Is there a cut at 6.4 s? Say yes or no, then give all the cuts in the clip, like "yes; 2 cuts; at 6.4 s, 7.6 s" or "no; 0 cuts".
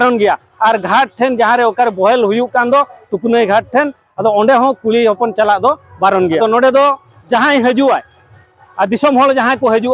yes; 1 cut; at 6.4 s